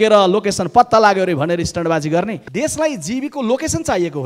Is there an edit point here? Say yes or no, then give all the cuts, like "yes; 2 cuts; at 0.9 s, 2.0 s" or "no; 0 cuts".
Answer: yes; 1 cut; at 2.4 s